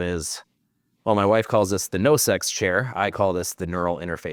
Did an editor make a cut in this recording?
no; 0 cuts

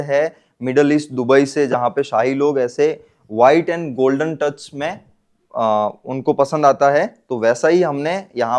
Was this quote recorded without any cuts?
yes; 0 cuts

